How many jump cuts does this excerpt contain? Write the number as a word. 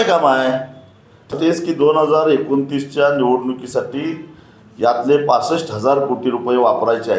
one